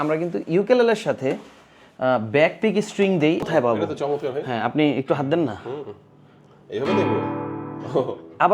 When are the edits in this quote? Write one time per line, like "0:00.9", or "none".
0:03.5